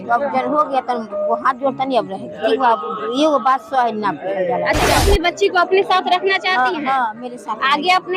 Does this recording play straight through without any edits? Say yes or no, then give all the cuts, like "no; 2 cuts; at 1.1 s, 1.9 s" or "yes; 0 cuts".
no; 1 cut; at 4.9 s